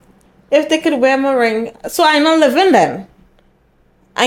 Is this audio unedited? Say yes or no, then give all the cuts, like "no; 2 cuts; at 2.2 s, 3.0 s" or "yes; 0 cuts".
yes; 0 cuts